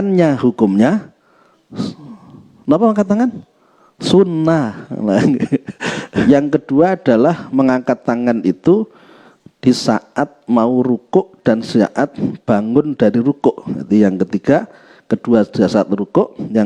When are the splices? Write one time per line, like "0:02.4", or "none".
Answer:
0:06.2